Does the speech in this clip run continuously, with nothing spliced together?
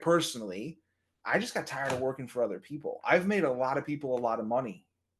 yes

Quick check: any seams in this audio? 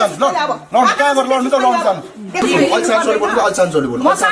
yes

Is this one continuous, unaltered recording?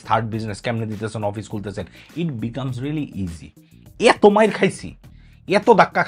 yes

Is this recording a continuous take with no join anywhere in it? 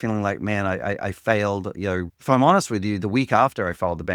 no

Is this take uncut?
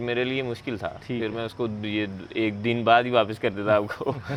yes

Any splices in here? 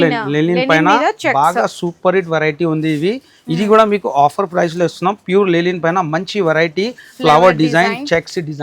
no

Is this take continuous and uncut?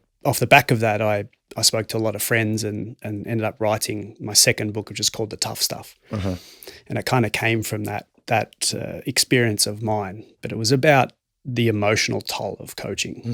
yes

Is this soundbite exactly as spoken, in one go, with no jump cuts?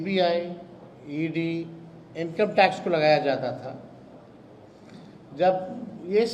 yes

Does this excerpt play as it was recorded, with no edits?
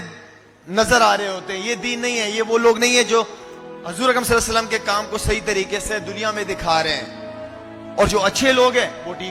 yes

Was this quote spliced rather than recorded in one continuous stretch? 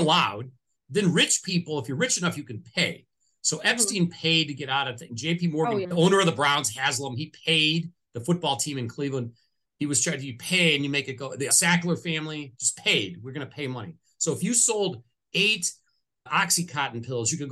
yes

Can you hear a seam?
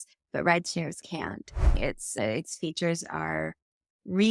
yes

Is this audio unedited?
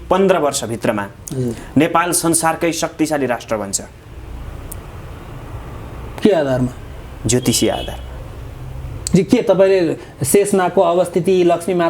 yes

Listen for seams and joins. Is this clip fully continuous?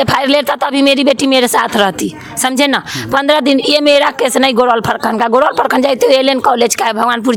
yes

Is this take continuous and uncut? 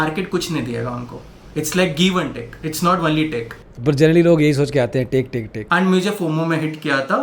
no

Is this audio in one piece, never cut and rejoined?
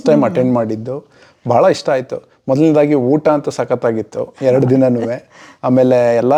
yes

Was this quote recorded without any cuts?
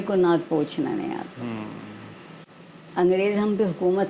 no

